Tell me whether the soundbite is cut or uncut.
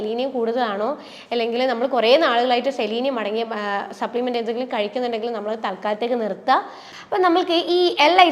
cut